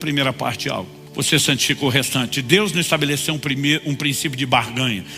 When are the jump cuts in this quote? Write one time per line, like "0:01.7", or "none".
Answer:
0:01.0